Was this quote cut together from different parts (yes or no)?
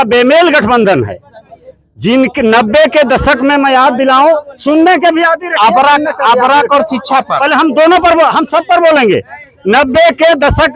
no